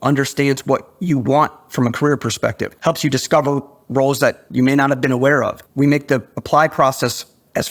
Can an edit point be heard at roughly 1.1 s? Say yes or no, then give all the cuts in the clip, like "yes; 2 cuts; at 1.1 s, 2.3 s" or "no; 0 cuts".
no; 3 cuts; at 2.7 s, 4.4 s, 5.6 s